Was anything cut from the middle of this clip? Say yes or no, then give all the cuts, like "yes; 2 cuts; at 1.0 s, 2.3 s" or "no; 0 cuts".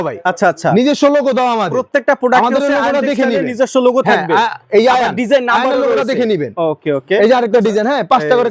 no; 0 cuts